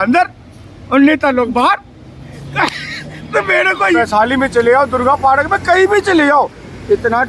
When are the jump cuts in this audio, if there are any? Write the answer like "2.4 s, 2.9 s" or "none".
4.0 s